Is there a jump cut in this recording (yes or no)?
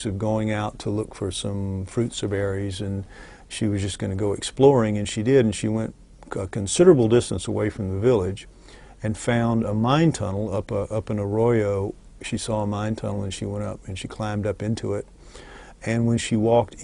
yes